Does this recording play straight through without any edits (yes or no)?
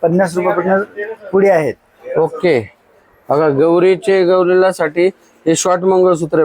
yes